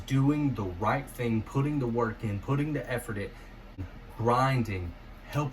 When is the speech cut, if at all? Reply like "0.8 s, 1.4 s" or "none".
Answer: 3.8 s